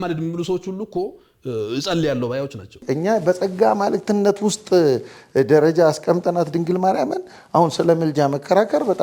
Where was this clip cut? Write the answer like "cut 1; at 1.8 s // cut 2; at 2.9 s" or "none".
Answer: cut 1; at 2.8 s